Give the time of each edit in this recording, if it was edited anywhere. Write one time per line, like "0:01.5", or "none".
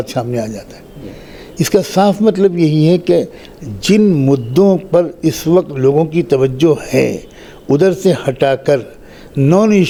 none